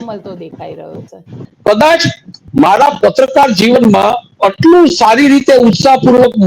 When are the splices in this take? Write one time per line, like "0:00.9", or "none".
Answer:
0:01.5